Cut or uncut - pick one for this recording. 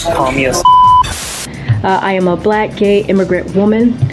cut